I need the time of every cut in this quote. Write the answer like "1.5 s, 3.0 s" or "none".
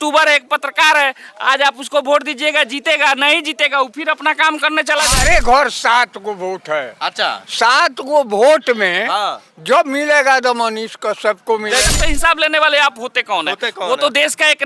5.2 s, 11.9 s